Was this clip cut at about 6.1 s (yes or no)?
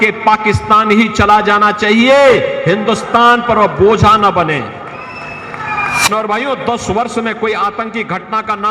yes